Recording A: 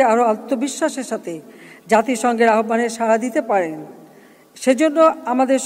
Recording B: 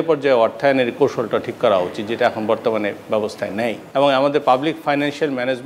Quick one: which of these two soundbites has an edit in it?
B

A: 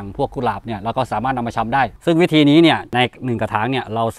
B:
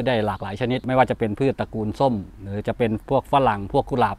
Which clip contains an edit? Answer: A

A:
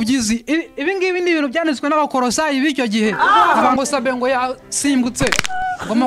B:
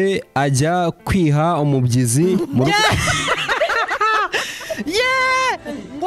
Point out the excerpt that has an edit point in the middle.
A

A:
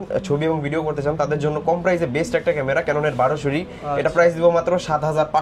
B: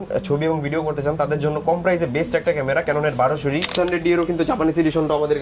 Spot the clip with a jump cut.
B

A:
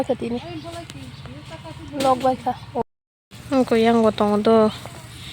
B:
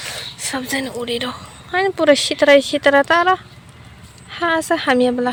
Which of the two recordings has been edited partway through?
A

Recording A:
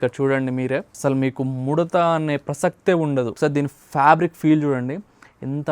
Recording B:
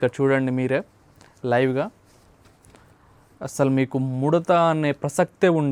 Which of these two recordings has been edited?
A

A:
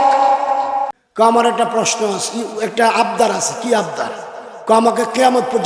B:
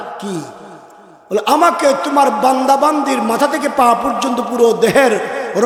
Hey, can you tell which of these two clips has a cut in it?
A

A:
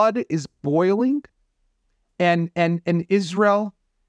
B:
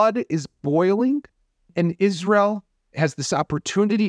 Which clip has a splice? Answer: B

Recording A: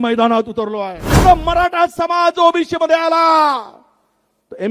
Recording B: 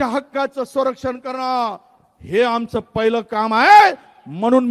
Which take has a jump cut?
A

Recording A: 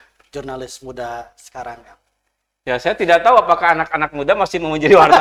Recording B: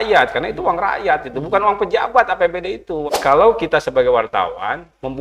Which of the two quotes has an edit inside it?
B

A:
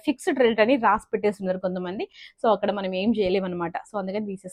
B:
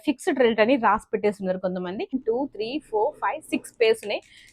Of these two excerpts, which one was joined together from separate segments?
B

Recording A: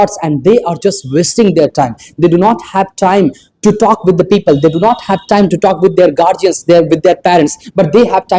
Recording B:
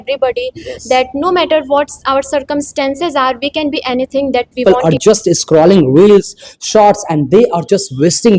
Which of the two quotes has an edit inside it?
B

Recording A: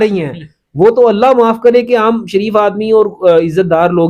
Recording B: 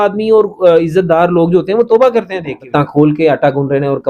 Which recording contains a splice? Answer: B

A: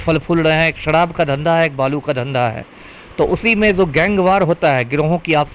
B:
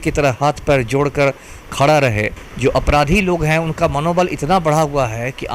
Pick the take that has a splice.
B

